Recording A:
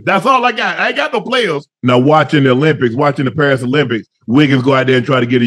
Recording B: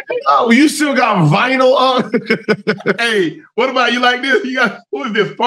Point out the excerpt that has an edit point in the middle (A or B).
A